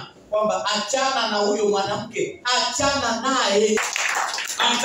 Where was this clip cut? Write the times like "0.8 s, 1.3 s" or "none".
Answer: 3.8 s